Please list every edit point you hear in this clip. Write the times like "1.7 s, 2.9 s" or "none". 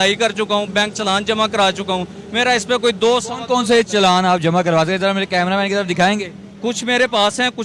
none